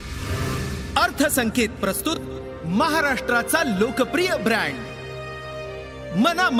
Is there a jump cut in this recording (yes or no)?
no